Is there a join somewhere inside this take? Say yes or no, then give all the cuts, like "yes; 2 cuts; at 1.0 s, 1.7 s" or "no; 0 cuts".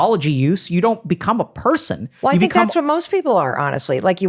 no; 0 cuts